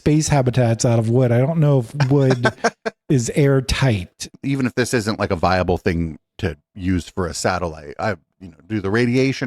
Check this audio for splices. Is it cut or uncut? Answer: cut